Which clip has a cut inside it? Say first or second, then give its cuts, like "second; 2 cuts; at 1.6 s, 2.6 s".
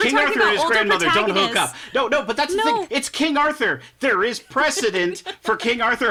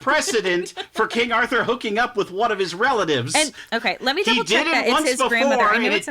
second; 1 cut; at 3.5 s